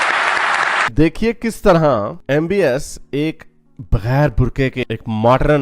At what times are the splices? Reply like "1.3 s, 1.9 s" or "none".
0.9 s